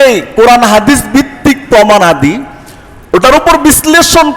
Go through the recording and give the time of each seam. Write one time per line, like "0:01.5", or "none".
none

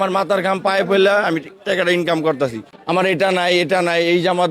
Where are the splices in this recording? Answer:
0:02.7

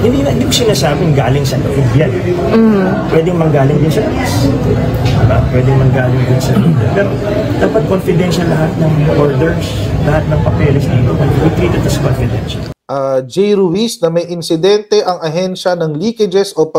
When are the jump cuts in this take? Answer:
0:12.8

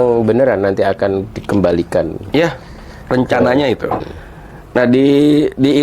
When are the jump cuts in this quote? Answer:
0:04.1

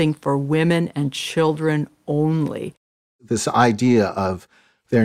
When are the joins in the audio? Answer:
0:03.1

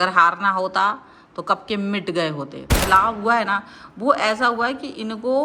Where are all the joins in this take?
0:02.8

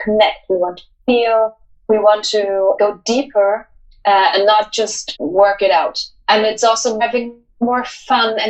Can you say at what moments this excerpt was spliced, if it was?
0:02.8
0:05.0
0:06.1
0:07.0

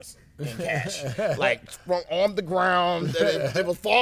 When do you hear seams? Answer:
none

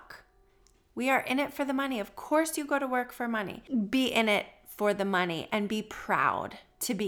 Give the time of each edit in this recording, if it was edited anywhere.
0:03.5

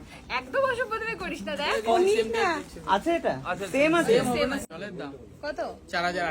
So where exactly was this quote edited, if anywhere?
0:04.6

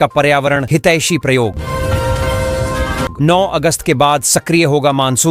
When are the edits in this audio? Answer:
none

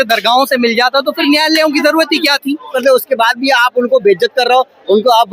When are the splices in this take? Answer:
0:02.7

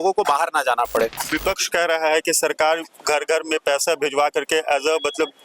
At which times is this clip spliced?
0:01.3

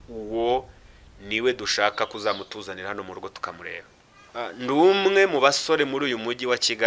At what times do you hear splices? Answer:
0:04.3

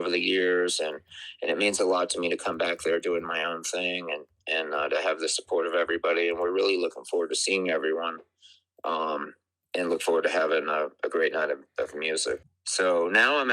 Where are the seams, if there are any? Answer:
0:12.5

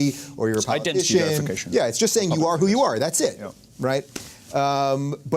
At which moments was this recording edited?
0:03.1

